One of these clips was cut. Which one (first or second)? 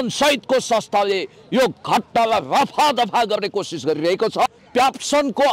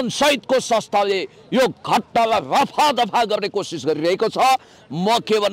first